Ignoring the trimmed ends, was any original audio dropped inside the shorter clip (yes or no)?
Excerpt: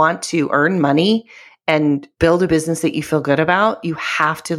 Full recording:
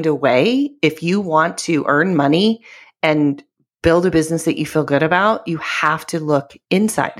yes